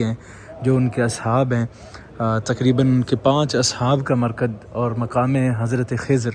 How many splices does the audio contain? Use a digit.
0